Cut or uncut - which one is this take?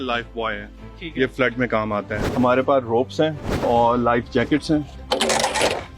cut